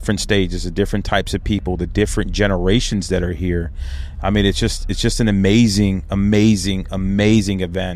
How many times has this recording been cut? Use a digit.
0